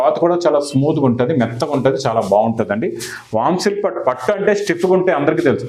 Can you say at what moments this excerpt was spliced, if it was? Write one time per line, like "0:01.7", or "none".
none